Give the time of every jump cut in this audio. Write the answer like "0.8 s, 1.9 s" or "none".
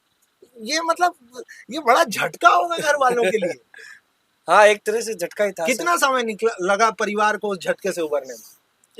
none